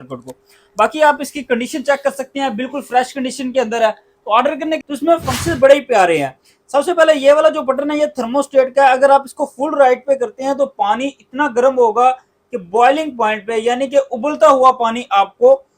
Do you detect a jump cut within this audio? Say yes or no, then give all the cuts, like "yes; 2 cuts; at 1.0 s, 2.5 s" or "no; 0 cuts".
yes; 1 cut; at 4.8 s